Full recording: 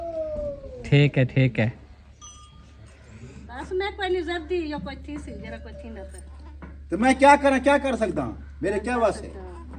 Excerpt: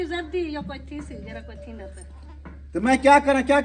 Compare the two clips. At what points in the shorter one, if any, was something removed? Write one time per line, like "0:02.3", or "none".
none